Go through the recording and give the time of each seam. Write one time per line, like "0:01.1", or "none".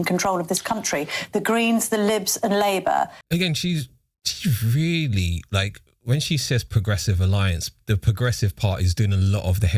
0:03.1